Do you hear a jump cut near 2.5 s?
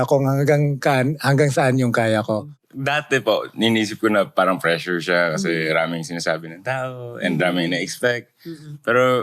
yes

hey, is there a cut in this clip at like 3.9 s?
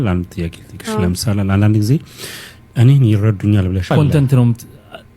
yes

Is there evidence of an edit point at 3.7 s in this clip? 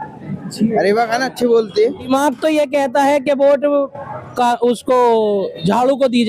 no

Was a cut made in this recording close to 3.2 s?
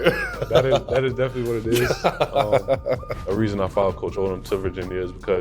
yes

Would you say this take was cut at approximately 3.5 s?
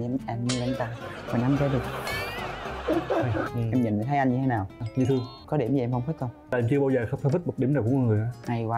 yes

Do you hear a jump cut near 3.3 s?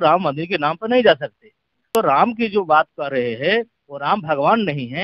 no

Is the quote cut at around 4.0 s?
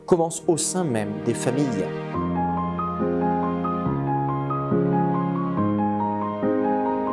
no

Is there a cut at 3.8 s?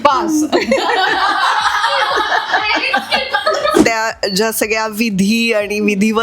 yes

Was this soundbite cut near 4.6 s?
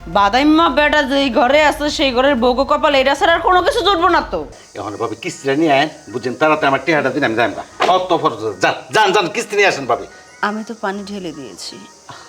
yes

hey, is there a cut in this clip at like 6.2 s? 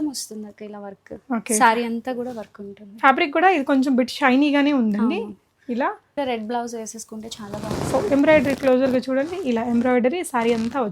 yes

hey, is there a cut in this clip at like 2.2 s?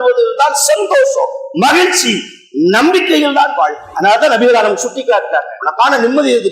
no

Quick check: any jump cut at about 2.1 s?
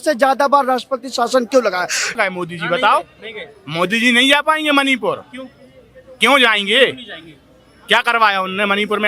yes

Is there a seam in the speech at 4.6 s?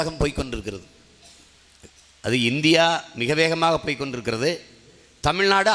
no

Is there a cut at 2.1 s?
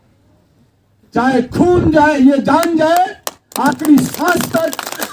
no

